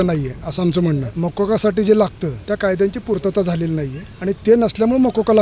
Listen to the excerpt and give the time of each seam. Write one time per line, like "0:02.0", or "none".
0:01.1
0:02.3
0:04.0